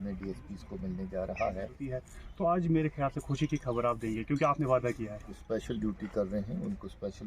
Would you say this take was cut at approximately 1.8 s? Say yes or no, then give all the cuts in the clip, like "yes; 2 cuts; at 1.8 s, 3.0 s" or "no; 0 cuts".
yes; 2 cuts; at 1.8 s, 5.4 s